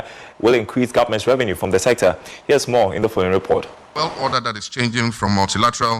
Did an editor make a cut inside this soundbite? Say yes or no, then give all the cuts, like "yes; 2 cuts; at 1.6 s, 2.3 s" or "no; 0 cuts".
yes; 1 cut; at 3.8 s